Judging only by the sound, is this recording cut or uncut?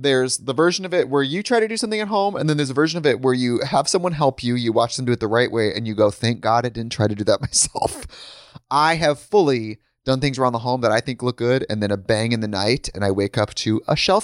uncut